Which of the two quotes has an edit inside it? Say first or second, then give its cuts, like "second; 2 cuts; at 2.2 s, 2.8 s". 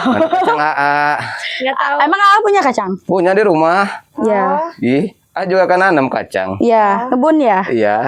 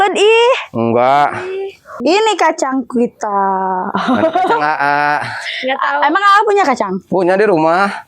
second; 1 cut; at 1.8 s